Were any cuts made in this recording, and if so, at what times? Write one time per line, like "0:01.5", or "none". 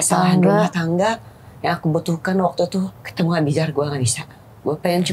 0:03.0